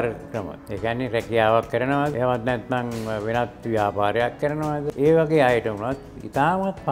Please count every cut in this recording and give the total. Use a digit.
2